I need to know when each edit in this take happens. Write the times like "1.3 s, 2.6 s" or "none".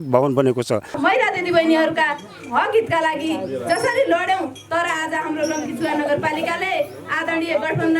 1.0 s